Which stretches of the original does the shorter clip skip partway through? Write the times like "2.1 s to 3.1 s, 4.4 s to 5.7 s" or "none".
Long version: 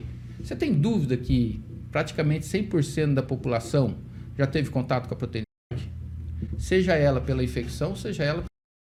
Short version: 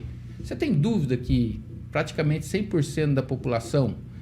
none